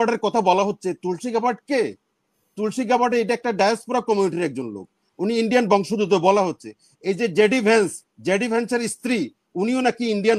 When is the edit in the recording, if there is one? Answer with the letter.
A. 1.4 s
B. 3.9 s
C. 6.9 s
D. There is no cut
D